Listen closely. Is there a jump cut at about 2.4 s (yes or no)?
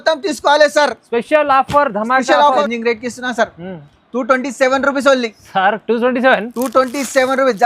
yes